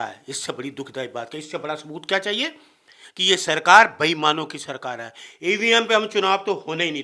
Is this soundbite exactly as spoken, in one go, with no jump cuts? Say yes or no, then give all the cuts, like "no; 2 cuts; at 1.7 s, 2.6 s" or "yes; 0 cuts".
yes; 0 cuts